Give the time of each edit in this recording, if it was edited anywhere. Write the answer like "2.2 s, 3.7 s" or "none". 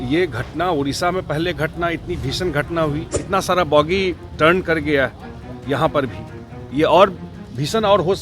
3.2 s